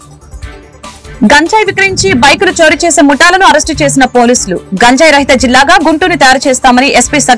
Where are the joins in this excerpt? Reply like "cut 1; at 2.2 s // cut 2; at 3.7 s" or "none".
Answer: cut 1; at 1.2 s